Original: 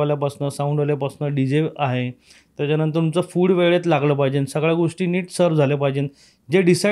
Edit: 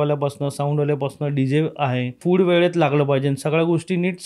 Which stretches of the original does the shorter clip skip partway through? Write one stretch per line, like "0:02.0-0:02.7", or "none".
0:02.2-0:03.3